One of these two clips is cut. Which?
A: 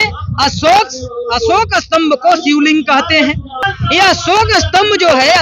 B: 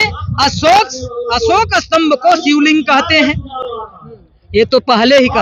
A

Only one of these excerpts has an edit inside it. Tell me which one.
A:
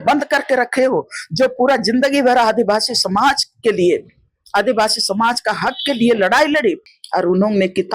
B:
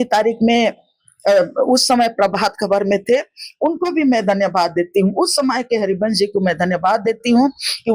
A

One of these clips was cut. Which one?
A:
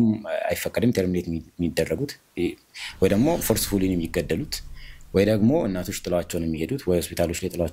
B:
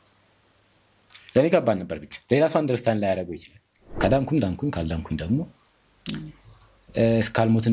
B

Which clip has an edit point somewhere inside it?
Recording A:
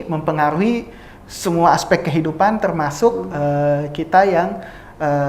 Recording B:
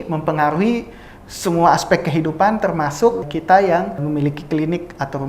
B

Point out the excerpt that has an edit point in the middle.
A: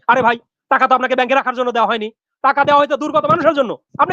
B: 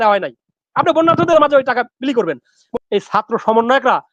B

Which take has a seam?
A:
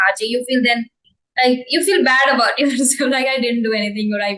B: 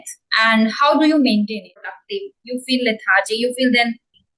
B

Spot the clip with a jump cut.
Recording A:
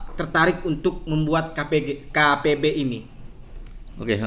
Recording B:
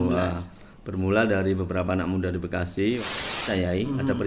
B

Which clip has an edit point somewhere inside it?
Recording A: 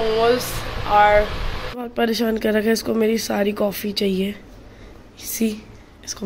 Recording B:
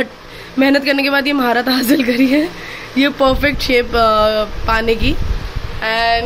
A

